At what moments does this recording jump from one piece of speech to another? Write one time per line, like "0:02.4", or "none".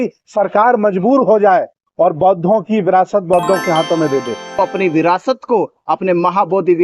0:04.6